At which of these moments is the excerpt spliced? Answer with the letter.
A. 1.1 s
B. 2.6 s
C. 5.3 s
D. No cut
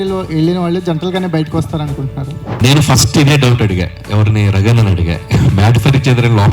B